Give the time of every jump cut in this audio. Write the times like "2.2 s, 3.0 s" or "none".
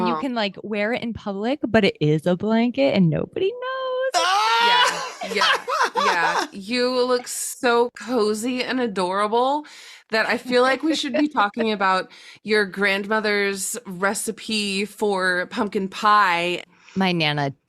16.6 s